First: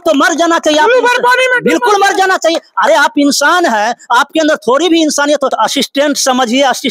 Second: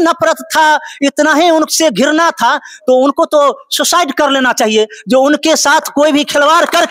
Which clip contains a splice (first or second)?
first